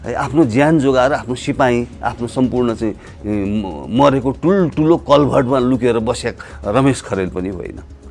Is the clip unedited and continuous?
yes; 0 cuts

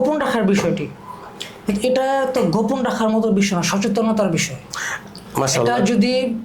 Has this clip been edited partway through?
no; 0 cuts

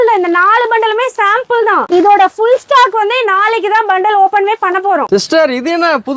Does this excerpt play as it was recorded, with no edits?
yes; 0 cuts

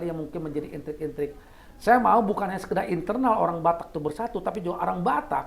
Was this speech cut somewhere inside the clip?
no; 0 cuts

